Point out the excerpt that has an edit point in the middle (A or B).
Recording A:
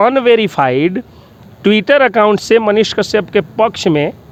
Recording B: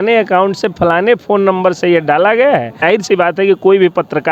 B